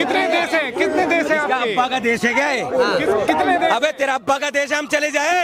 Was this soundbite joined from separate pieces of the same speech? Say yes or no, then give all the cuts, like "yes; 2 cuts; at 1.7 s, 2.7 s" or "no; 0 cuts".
no; 0 cuts